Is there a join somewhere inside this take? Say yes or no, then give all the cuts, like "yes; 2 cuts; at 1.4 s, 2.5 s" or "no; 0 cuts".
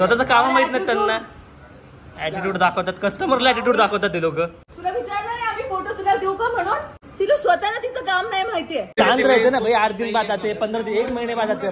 yes; 3 cuts; at 4.7 s, 7.0 s, 8.9 s